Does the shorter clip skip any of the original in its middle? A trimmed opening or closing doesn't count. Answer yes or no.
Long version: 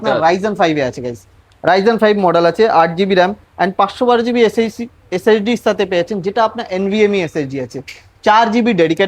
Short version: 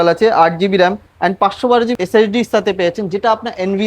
yes